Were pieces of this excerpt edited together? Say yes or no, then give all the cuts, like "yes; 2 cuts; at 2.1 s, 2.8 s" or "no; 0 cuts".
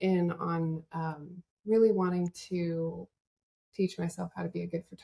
no; 0 cuts